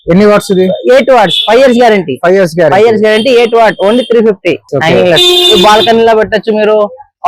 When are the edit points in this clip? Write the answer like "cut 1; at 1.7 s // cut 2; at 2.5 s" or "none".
cut 1; at 4.7 s